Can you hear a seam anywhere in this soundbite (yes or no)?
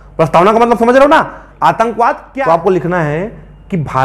yes